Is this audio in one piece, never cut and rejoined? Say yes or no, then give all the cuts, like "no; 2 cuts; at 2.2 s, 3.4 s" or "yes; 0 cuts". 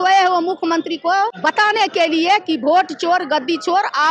no; 1 cut; at 1.4 s